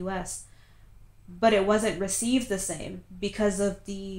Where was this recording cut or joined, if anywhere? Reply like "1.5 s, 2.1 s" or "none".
none